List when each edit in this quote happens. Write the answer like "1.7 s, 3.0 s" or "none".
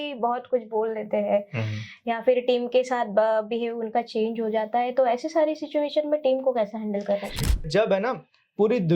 7.7 s